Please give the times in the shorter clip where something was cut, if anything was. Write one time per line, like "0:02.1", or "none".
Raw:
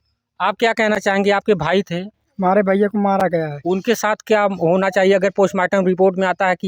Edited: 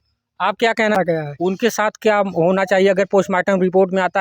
0:01.0